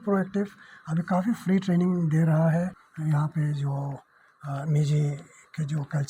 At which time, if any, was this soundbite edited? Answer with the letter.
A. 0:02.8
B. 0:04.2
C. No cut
A